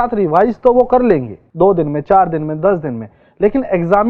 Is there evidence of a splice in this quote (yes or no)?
yes